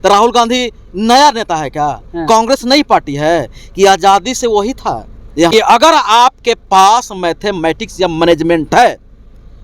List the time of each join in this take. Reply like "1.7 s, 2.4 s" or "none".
5.5 s

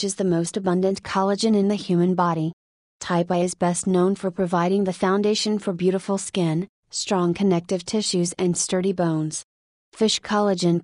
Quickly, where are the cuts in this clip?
9.8 s

